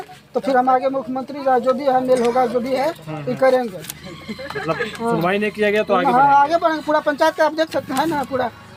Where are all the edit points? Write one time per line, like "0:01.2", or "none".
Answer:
none